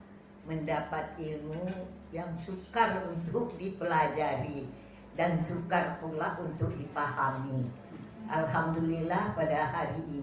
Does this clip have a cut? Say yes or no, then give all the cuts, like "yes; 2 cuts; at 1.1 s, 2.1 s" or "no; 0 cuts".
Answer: no; 0 cuts